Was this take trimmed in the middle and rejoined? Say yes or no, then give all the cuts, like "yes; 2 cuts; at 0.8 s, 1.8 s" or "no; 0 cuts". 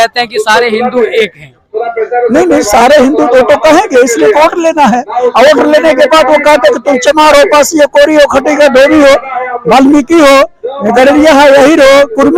no; 0 cuts